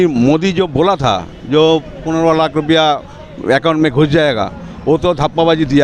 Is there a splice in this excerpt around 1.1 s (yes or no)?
no